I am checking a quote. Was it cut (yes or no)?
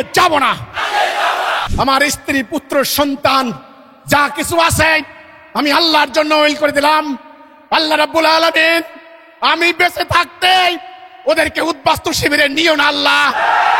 yes